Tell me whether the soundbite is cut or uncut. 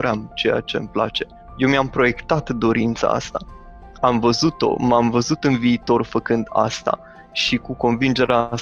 uncut